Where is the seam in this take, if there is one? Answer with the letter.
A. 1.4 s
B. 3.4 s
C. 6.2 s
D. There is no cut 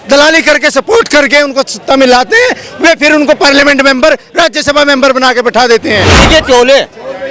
C